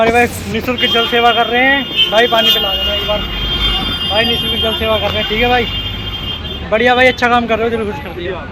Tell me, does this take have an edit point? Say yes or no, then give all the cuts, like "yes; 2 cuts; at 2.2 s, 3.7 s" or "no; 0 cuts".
no; 0 cuts